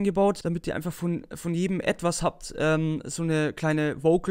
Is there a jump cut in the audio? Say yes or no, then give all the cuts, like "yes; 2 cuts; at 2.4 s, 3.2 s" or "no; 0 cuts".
no; 0 cuts